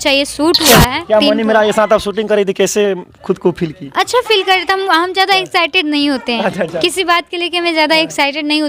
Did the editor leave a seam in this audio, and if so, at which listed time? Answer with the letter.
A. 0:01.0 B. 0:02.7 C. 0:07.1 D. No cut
A